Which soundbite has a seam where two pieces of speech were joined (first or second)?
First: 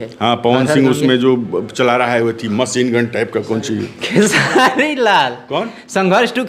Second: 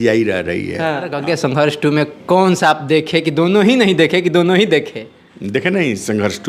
second